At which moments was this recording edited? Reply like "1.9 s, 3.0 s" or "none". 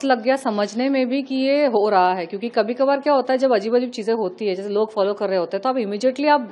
none